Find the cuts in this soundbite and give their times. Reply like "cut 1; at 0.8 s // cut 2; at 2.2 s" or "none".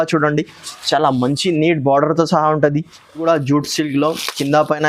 cut 1; at 3.2 s